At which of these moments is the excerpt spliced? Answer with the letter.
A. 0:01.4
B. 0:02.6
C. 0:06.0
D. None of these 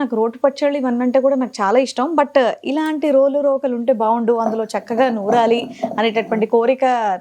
D